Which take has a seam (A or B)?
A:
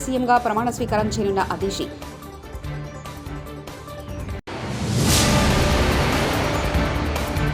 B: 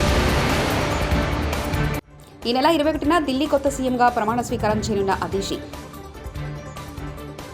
B